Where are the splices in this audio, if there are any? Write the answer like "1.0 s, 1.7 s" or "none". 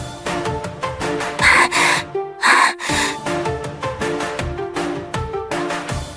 none